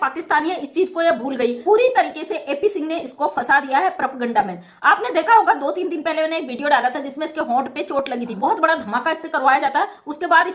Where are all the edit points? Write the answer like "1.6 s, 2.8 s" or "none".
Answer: 1.6 s, 8.3 s

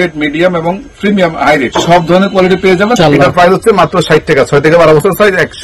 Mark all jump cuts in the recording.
1.7 s, 2.9 s

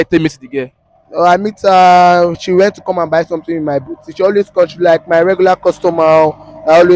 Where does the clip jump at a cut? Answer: none

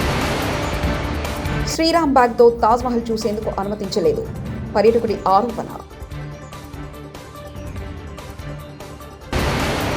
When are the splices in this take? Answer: 1.2 s

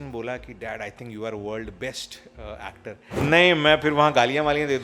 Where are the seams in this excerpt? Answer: 3.2 s

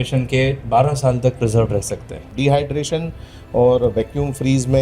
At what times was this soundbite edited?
2.2 s

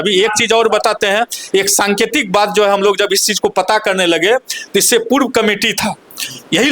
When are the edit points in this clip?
none

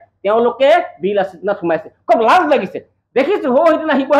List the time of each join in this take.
none

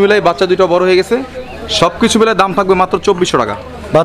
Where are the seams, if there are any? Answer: none

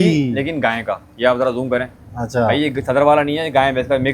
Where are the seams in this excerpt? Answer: none

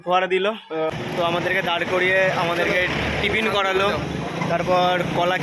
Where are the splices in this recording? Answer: 0.9 s

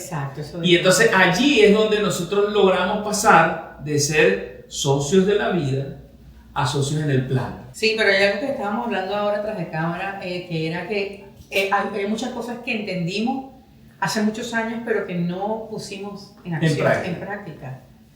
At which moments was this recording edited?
7.6 s

